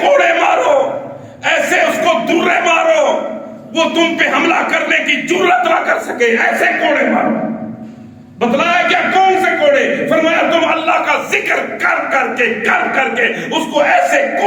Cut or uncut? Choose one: uncut